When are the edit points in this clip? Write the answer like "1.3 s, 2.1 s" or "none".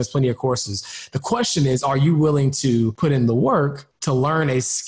2.9 s, 3.9 s